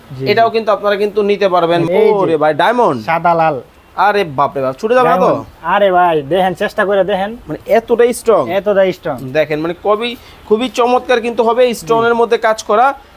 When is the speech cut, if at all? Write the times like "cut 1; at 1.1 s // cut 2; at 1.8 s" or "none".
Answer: cut 1; at 1.9 s